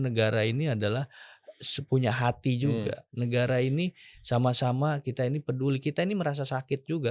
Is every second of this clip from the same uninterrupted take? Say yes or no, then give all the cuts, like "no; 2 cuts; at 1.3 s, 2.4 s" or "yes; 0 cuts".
yes; 0 cuts